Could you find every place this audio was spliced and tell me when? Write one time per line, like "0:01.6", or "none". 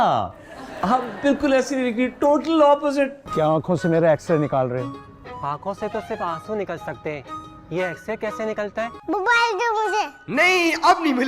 0:03.2
0:09.0